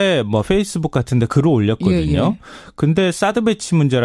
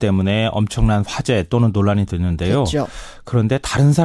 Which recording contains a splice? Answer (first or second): second